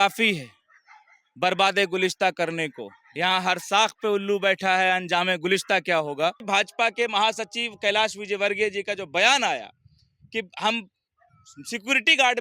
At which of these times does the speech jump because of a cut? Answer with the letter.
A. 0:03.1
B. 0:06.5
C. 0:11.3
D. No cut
B